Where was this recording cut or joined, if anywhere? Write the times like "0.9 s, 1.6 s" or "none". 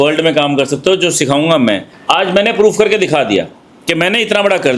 1.9 s